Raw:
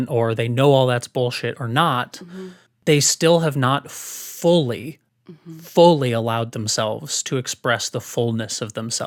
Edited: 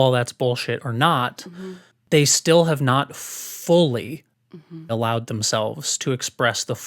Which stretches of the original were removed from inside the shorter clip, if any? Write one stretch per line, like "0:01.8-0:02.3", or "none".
0:05.7-0:06.2